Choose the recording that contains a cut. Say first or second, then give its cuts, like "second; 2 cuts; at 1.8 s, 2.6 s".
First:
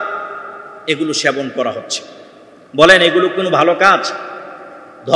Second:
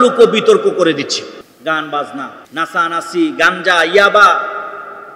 second; 2 cuts; at 1.4 s, 2.4 s